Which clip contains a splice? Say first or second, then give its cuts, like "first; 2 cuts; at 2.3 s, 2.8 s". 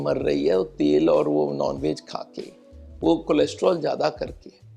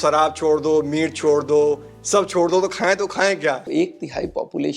second; 1 cut; at 3.7 s